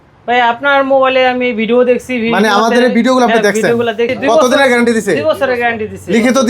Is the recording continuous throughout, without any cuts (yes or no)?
no